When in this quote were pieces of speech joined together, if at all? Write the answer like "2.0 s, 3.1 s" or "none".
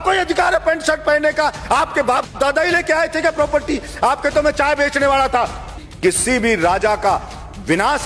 5.8 s